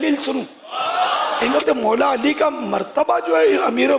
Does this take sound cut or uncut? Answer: cut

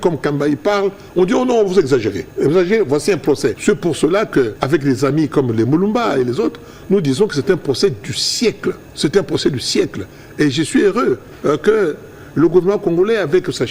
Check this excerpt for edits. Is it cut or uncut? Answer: cut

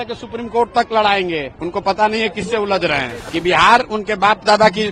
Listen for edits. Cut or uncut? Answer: cut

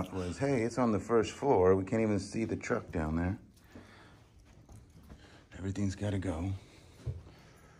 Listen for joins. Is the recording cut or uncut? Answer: uncut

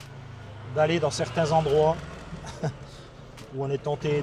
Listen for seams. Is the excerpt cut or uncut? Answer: uncut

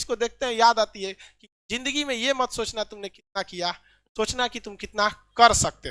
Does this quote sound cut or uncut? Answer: uncut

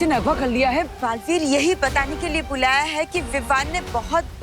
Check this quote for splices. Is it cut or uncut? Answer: cut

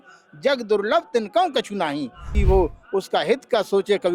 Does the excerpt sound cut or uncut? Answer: cut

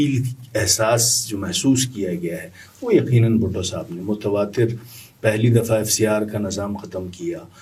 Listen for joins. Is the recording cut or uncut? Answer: uncut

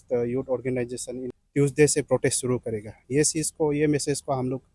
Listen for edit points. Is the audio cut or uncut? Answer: cut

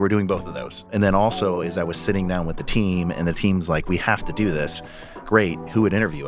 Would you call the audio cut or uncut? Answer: cut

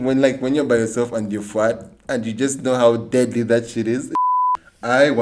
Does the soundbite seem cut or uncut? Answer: cut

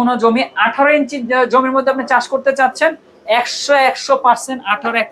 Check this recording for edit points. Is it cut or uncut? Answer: uncut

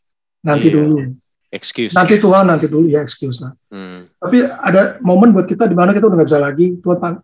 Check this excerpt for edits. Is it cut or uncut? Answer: uncut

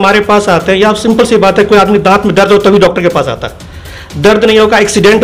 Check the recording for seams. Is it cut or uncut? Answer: uncut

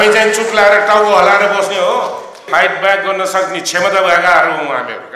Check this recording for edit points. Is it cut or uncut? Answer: cut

